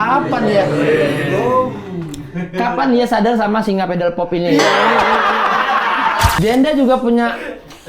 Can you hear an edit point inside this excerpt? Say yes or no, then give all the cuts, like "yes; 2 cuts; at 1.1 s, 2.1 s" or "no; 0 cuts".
yes; 1 cut; at 6.4 s